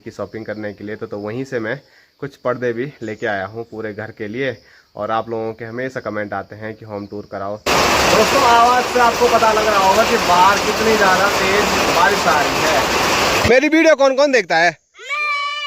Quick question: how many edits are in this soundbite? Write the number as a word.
two